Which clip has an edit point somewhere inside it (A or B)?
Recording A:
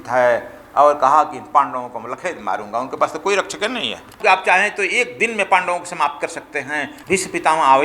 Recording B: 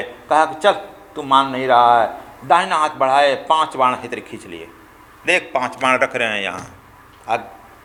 A